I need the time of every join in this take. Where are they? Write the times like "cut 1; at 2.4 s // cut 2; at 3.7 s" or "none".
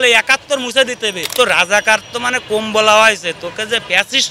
cut 1; at 1.2 s